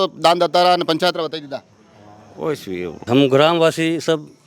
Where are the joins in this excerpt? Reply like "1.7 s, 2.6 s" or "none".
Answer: 3.1 s